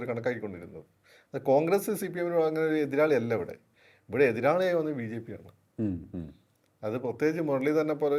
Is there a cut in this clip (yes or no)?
no